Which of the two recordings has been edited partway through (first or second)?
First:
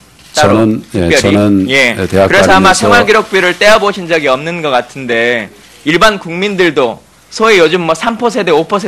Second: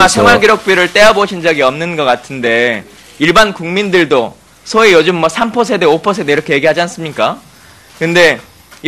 first